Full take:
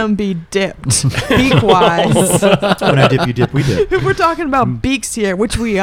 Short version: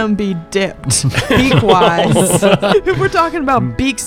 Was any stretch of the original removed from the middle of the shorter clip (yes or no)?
yes